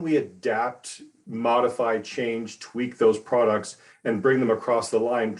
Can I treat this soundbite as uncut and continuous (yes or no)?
yes